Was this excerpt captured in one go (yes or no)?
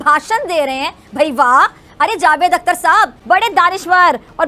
no